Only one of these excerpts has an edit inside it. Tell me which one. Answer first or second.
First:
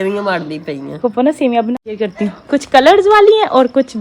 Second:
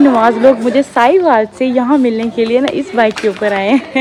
first